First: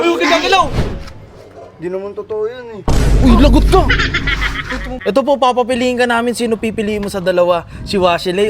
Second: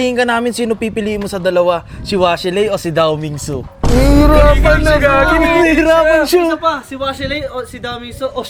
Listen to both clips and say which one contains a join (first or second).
first